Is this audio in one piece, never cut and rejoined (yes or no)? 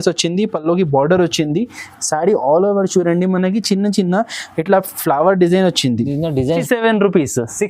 no